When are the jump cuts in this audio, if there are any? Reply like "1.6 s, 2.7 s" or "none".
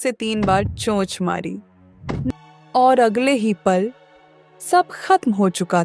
2.3 s